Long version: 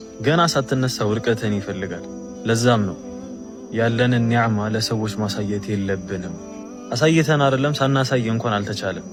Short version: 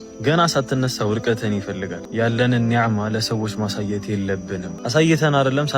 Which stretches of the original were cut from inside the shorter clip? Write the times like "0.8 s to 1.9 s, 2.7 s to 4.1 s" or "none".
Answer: 2.0 s to 3.6 s, 6.3 s to 6.8 s